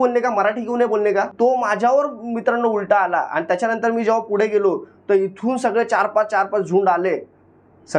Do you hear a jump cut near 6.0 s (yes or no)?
no